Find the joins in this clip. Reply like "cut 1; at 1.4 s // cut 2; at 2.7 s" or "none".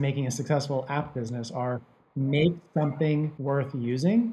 cut 1; at 3.3 s

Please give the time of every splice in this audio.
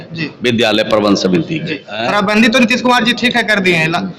cut 1; at 1.9 s

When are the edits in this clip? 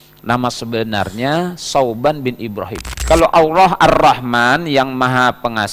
cut 1; at 2.9 s

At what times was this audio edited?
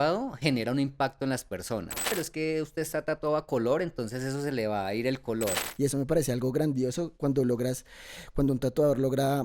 cut 1; at 2.1 s // cut 2; at 5.6 s

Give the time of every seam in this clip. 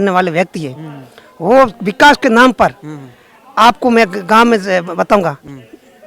none

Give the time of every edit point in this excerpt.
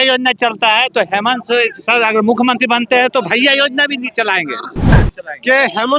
cut 1; at 4.8 s

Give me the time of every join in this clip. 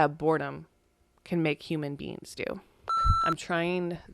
cut 1; at 3.1 s

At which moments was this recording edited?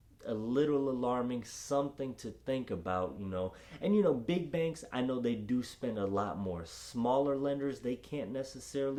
none

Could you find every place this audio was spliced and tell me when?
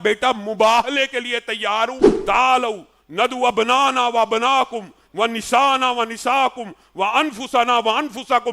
cut 1; at 2.1 s

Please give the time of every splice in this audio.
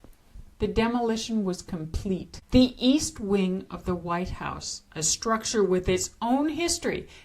cut 1; at 2.3 s

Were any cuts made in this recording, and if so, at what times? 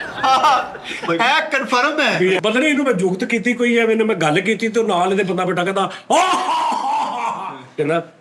cut 1; at 2.4 s

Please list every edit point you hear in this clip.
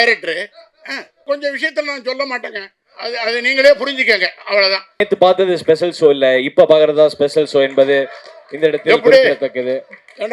cut 1; at 1.2 s // cut 2; at 5.0 s

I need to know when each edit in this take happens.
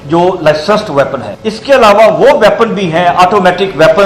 cut 1; at 1.5 s

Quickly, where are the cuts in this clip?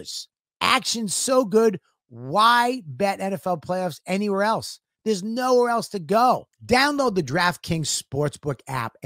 cut 1; at 6.5 s

